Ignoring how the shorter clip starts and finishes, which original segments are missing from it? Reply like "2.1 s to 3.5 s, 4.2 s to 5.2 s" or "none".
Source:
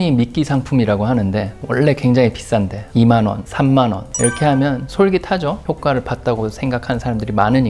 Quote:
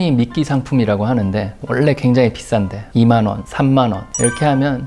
none